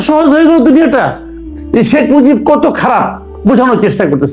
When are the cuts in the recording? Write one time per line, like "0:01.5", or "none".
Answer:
0:01.5